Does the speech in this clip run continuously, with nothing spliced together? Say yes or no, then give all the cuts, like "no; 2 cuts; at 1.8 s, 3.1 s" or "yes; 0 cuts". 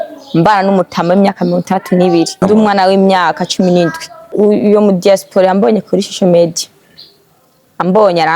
no; 2 cuts; at 2.3 s, 4.3 s